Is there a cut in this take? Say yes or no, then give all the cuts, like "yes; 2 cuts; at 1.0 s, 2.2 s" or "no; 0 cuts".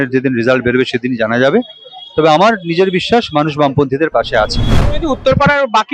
yes; 1 cut; at 4.7 s